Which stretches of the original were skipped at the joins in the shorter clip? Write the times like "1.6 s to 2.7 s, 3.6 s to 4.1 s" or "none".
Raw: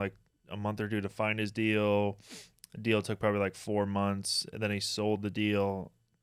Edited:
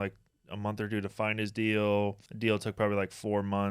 2.2 s to 2.7 s